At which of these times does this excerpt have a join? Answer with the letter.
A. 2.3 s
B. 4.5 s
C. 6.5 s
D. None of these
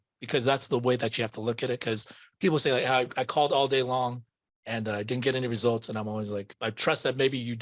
C